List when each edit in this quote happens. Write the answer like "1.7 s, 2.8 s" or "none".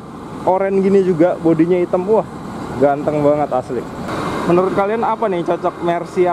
4.1 s